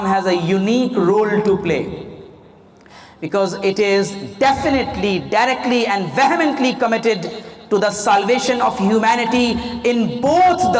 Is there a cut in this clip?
no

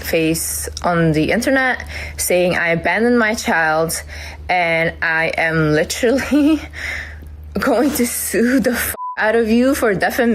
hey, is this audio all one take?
yes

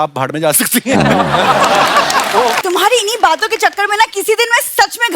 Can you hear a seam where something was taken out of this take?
yes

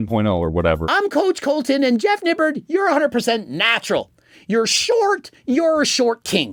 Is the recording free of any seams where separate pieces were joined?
yes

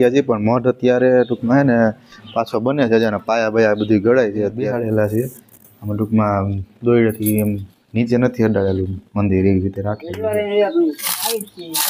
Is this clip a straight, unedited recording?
no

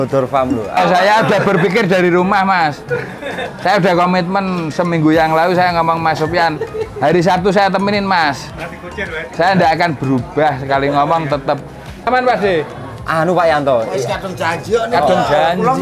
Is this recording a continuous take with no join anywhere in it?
no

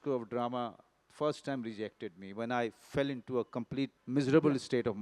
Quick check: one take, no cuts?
no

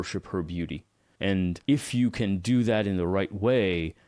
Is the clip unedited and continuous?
no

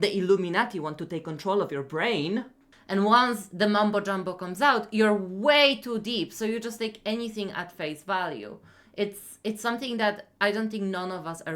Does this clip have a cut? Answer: yes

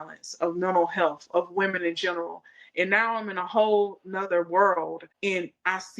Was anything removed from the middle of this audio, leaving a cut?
yes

